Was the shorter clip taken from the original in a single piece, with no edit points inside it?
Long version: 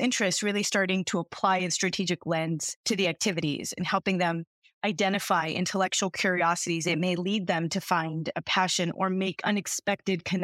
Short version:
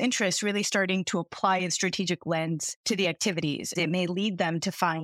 no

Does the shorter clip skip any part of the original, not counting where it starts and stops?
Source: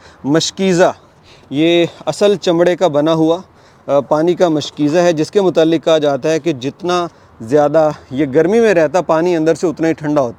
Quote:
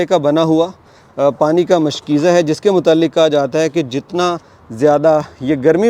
no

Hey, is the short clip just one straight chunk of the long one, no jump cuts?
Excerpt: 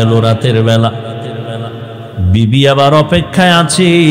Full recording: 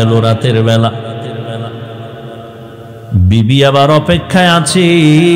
no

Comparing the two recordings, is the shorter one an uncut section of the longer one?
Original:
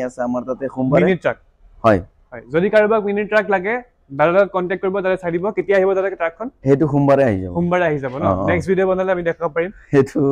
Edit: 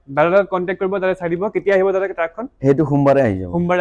yes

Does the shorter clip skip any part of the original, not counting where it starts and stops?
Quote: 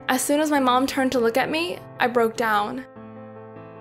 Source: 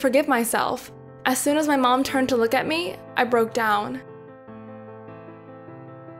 yes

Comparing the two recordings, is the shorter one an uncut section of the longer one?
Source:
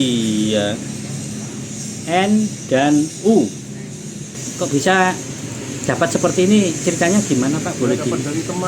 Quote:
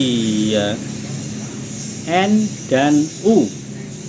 yes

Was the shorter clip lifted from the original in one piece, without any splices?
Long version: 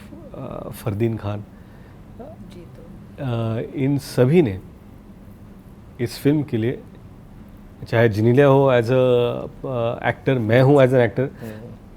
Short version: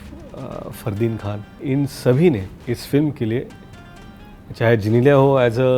no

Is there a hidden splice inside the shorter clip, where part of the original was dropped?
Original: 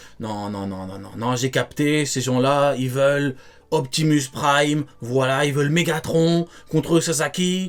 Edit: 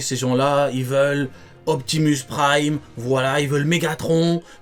no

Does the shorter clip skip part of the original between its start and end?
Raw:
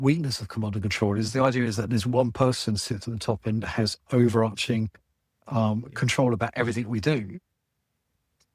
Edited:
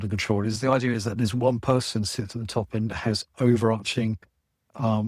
no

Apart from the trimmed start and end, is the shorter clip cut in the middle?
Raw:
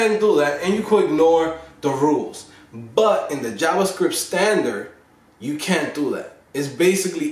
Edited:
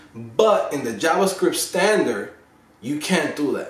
no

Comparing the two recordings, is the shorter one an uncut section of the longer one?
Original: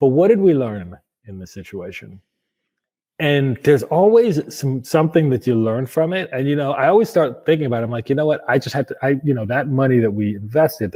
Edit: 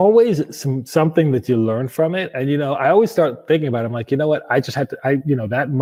yes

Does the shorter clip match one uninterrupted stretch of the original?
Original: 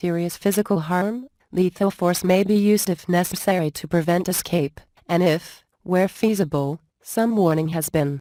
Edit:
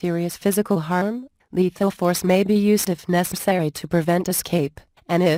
yes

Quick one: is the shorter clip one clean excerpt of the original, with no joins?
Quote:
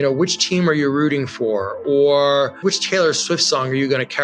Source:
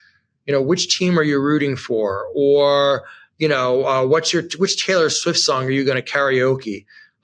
no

